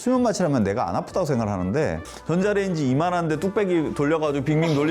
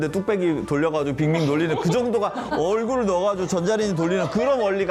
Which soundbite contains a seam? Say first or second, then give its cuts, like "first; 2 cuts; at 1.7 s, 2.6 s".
first; 1 cut; at 2.1 s